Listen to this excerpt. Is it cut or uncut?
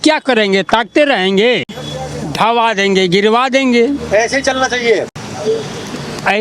uncut